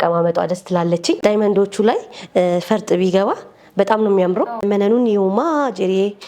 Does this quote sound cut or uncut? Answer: cut